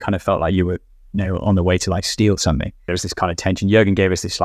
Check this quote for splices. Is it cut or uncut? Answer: cut